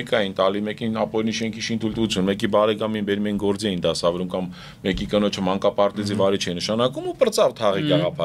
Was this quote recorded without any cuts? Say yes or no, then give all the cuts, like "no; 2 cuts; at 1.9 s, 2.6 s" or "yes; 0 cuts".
yes; 0 cuts